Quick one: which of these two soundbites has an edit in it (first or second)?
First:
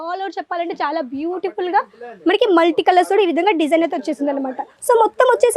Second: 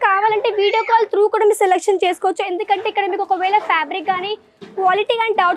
first